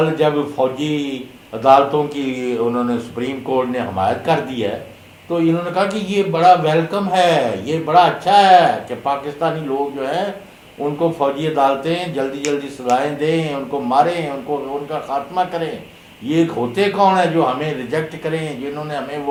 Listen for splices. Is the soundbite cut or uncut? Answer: uncut